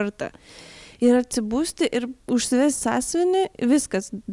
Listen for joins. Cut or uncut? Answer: cut